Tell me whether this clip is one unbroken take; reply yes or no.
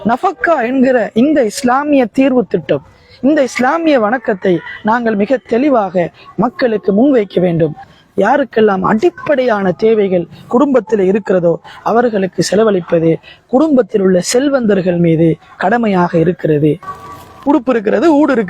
no